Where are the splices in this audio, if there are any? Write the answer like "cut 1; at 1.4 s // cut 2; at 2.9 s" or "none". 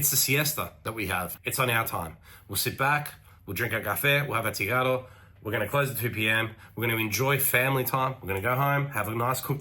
cut 1; at 1.3 s